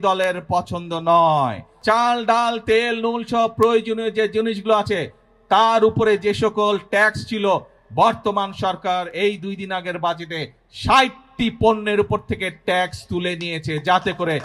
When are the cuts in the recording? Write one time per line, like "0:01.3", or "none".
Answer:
0:01.7